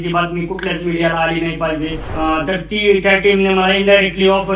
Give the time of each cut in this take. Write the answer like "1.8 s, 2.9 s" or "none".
2.0 s